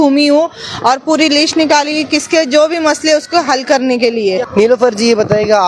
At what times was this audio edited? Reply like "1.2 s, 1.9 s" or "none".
4.4 s